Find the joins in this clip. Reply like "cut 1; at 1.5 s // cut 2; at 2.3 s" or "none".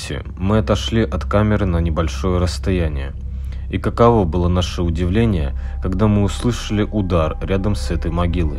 none